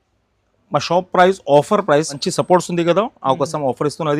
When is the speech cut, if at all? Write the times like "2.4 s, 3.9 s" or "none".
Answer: 2.2 s